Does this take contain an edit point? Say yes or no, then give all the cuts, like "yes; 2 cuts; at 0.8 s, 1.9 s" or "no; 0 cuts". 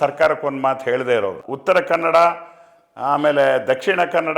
yes; 1 cut; at 1.5 s